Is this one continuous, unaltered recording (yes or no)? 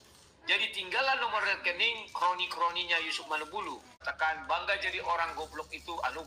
no